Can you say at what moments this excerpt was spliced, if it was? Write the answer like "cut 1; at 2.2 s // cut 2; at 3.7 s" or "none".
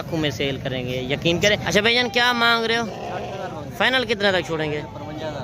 cut 1; at 1.6 s